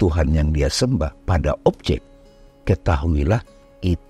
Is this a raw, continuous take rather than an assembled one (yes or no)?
yes